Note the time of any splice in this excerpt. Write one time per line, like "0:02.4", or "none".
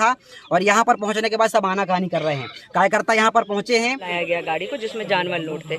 0:04.1